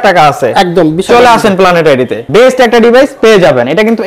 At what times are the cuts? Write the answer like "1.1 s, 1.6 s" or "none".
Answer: 2.2 s